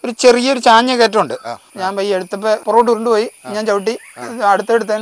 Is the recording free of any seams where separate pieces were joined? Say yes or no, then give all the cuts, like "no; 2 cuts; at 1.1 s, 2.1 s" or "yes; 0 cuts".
no; 2 cuts; at 1.7 s, 2.6 s